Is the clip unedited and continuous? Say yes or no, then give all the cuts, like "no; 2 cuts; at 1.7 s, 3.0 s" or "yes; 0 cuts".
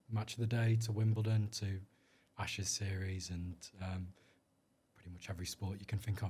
yes; 0 cuts